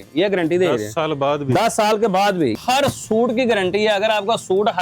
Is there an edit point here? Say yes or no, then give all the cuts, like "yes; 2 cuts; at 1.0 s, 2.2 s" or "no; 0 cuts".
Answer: yes; 1 cut; at 2.6 s